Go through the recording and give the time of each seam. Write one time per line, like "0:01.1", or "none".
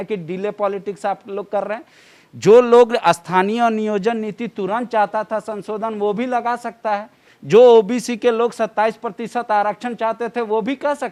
none